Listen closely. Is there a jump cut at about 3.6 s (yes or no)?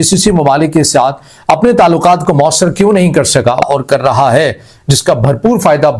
yes